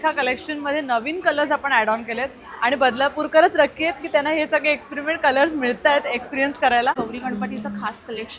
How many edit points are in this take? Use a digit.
1